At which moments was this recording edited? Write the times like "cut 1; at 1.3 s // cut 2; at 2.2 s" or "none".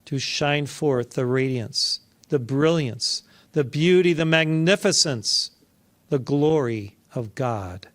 cut 1; at 7.0 s